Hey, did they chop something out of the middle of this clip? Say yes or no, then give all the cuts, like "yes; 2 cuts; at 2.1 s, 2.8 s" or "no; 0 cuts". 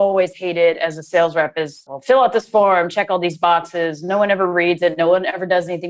yes; 1 cut; at 1.8 s